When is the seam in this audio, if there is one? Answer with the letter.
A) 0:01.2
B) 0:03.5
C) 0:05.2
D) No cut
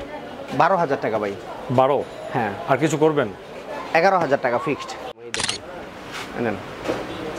C